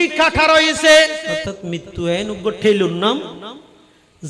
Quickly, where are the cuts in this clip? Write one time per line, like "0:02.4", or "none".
0:01.5